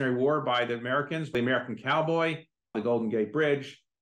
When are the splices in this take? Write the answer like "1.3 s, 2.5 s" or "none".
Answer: 1.3 s